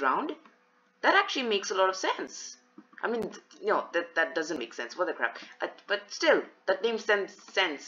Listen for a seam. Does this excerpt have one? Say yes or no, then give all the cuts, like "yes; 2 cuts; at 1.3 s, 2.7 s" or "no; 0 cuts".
no; 0 cuts